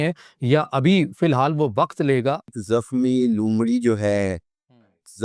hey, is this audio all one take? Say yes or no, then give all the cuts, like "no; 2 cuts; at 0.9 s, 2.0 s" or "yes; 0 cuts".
no; 1 cut; at 2.6 s